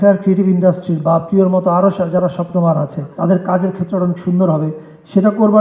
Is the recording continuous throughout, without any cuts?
no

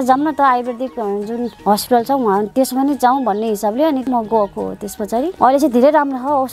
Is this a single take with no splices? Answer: no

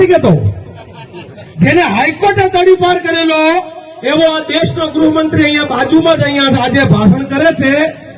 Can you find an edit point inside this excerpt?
no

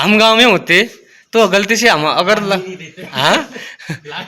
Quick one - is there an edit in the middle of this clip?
no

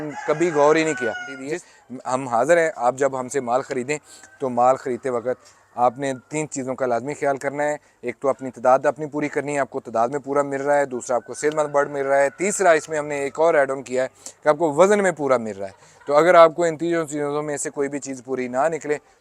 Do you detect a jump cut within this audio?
yes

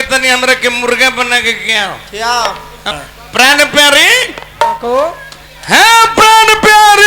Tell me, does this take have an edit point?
yes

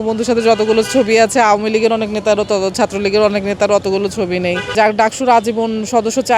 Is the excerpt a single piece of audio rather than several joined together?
no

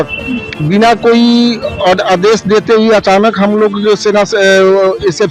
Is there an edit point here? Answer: no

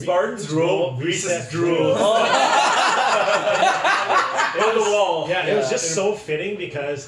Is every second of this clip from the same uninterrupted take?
yes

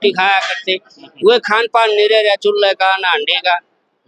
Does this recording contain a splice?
no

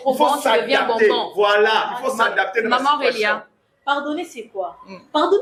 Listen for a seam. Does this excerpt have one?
no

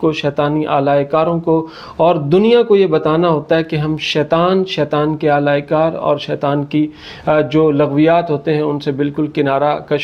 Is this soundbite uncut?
yes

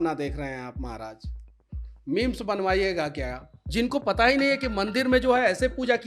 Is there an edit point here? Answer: yes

